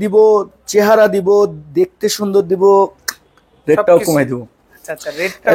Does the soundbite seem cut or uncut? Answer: uncut